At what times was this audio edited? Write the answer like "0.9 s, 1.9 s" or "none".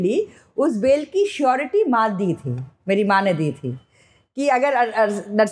none